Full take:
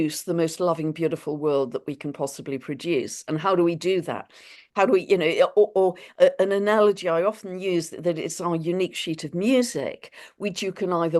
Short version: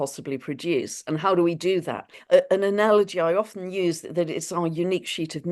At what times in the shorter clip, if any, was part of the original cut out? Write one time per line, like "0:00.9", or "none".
0:02.2